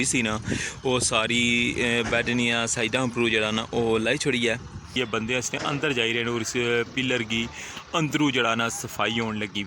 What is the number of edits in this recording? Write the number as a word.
one